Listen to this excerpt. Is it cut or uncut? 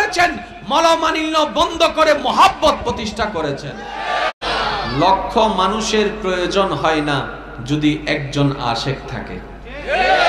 cut